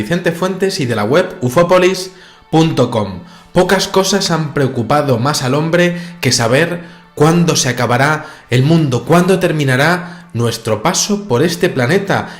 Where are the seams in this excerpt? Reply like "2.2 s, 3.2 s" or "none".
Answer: 5.4 s